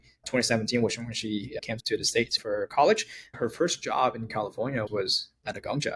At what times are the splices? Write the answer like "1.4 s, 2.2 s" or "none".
2.0 s, 3.3 s, 4.9 s